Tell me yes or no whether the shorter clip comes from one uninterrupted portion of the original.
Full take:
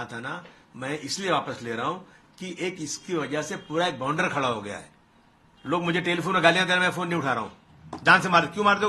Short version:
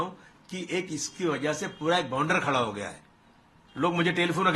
yes